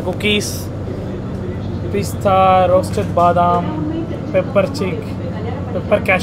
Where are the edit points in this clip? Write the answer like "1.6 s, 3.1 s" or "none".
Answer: none

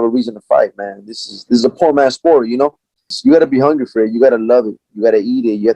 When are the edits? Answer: 3.1 s

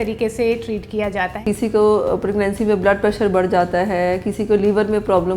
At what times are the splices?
1.4 s

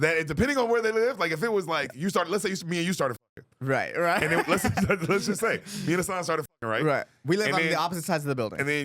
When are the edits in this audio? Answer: none

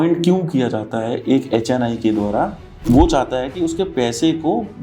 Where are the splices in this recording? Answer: 2.8 s

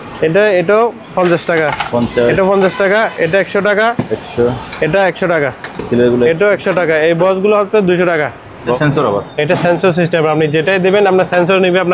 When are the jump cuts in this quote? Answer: 8.8 s

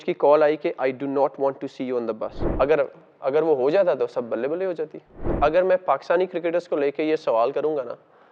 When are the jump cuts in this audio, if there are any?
2.4 s, 5.3 s

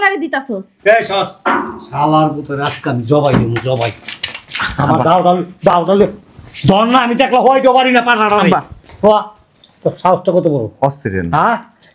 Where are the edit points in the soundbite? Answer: none

